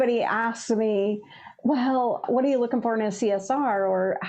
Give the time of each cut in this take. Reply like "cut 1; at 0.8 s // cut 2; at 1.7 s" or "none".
cut 1; at 2.2 s